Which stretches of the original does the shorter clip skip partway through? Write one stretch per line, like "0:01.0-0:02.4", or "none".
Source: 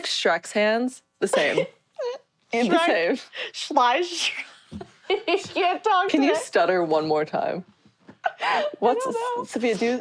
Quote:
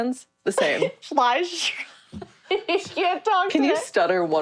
0:01.8-0:03.6